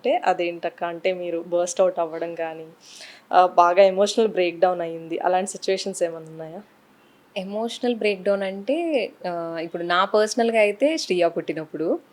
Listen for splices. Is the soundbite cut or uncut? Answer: uncut